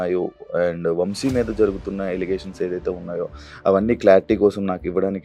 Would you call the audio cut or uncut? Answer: uncut